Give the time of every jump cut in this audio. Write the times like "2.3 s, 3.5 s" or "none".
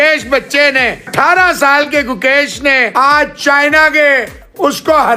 1.1 s, 2.9 s